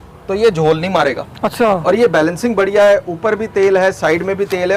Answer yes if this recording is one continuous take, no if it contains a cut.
yes